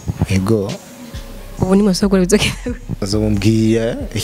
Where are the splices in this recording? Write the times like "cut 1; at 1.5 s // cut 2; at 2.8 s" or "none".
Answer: cut 1; at 3.1 s